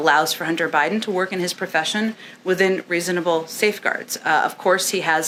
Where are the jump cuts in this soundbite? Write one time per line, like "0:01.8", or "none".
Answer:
none